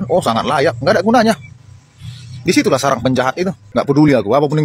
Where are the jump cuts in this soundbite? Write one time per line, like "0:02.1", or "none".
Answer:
0:03.6